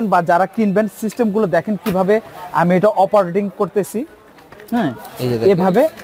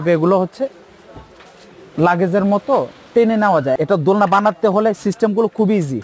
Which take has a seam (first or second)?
second